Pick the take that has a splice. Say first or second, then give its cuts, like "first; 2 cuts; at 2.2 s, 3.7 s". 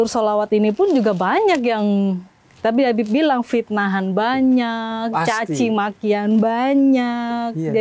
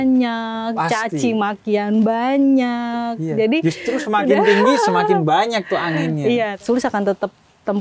second; 1 cut; at 6.5 s